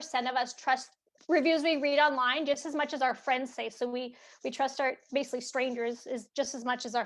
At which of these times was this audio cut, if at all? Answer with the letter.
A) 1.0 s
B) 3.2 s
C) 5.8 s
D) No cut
A